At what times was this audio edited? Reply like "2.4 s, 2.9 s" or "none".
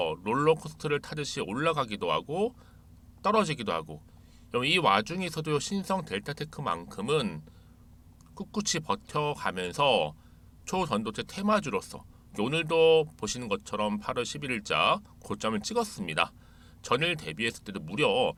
none